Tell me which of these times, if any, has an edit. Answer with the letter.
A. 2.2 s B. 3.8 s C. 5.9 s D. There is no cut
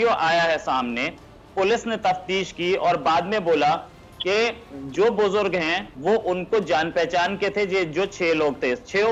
D